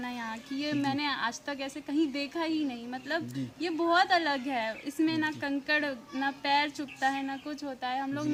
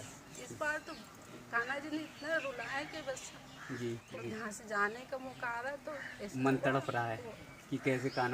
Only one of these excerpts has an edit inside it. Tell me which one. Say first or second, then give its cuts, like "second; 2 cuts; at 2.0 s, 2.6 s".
second; 1 cut; at 4.1 s